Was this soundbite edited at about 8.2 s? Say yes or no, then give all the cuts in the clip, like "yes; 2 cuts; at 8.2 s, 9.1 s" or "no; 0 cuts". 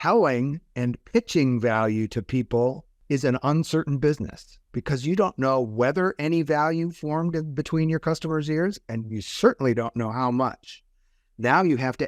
no; 1 cut; at 2.9 s